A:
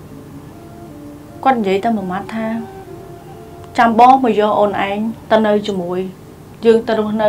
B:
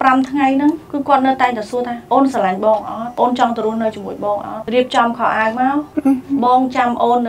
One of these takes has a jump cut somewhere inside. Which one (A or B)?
B